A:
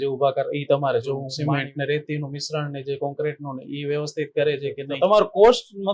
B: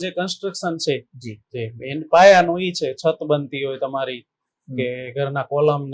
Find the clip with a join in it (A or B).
A